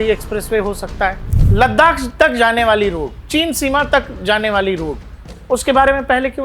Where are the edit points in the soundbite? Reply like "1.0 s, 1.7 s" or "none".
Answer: 1.3 s